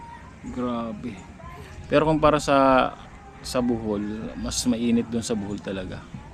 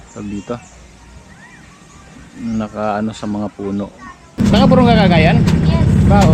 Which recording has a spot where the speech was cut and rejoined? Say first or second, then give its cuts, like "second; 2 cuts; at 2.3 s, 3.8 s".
second; 1 cut; at 4.4 s